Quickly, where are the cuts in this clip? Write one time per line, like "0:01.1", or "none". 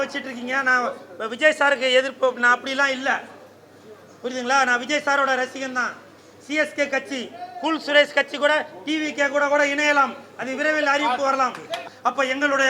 0:11.8

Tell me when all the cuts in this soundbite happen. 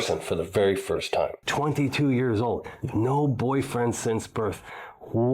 0:01.4

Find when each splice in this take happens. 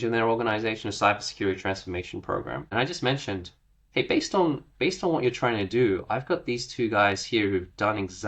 0:02.6

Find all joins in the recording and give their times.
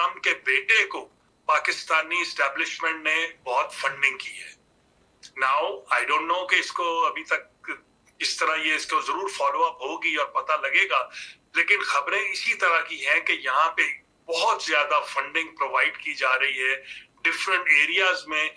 none

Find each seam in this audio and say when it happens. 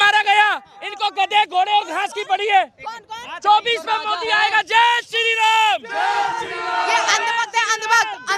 none

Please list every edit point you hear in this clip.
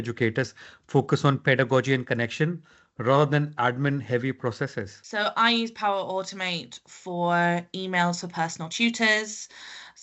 0:05.0

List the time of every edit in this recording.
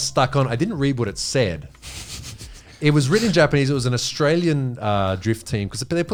none

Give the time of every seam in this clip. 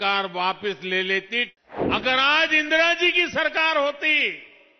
0:01.5

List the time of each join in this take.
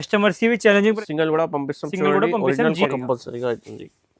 0:01.0
0:02.8

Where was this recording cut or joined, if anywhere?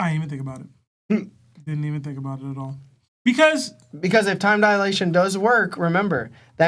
none

